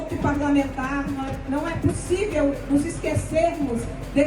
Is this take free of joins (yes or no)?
yes